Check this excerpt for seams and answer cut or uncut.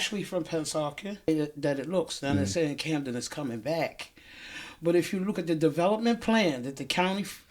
cut